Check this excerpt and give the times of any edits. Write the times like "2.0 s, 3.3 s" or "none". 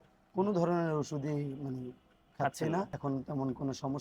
2.9 s